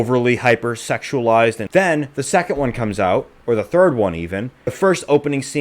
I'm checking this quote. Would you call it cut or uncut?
cut